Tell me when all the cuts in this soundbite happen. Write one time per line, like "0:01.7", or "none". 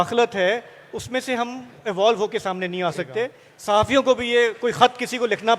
0:03.5